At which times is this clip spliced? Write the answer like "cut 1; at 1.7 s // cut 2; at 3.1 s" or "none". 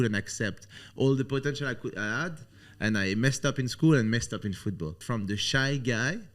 cut 1; at 5.0 s